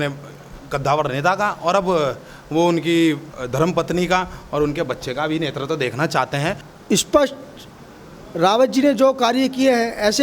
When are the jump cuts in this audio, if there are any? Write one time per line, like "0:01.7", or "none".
0:06.7